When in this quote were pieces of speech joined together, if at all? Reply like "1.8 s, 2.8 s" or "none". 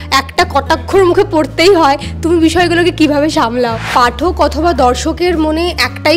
3.8 s